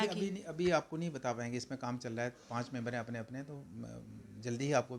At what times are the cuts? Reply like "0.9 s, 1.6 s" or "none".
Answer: none

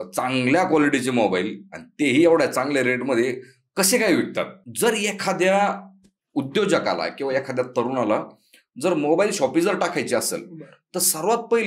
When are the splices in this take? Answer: 4.6 s

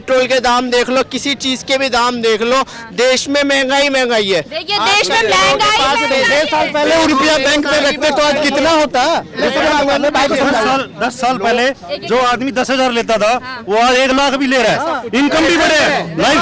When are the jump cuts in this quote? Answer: none

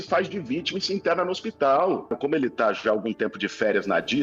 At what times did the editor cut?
2.2 s

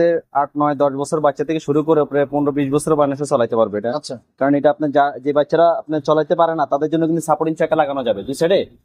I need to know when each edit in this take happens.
none

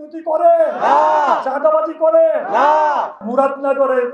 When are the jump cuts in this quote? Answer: 3.2 s

